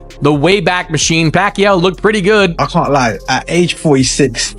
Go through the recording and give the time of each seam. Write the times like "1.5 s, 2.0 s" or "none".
2.5 s